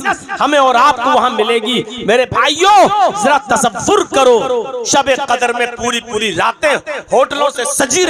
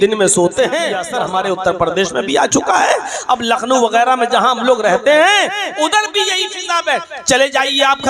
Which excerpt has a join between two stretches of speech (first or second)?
second